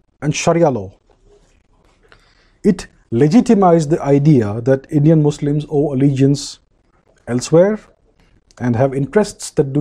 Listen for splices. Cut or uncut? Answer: uncut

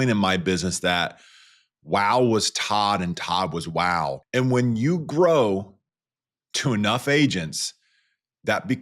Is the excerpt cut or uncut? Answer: cut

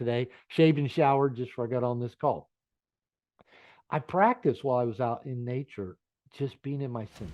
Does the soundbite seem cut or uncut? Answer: uncut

